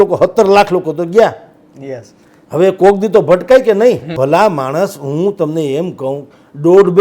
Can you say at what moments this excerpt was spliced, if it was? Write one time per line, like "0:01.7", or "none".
0:04.1